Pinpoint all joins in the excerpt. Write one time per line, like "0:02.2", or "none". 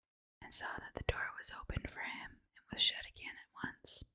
none